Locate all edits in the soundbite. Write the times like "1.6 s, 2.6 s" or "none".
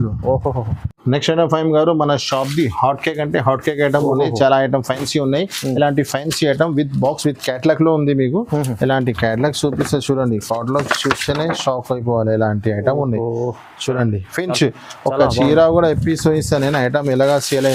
none